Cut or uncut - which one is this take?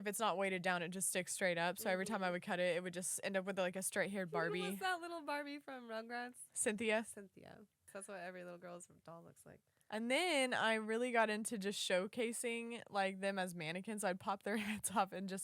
cut